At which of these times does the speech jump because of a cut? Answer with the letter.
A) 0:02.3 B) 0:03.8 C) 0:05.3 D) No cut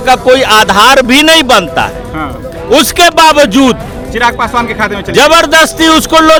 D